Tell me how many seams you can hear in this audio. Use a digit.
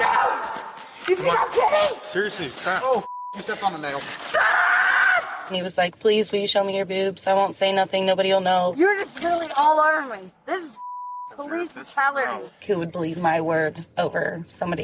4